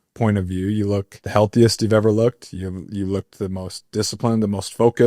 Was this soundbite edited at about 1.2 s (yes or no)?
yes